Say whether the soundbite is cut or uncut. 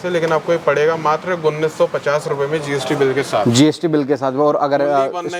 uncut